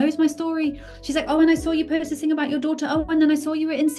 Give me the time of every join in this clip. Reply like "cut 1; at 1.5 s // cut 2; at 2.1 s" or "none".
none